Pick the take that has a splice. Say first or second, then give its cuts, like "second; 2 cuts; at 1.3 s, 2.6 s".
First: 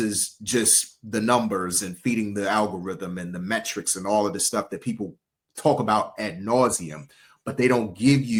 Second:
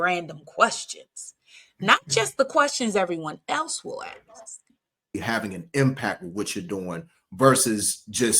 second; 1 cut; at 5.2 s